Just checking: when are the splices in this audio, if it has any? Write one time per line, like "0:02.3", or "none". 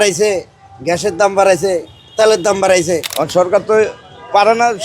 0:03.1